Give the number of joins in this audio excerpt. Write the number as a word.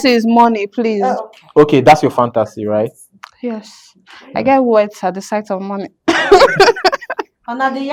zero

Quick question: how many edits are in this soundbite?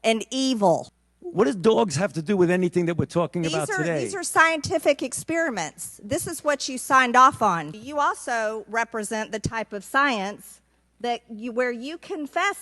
two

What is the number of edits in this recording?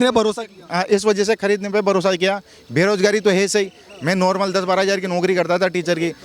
zero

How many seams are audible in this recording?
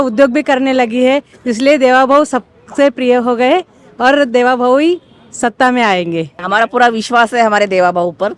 one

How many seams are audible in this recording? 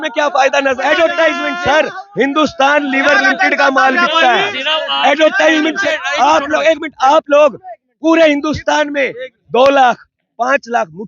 two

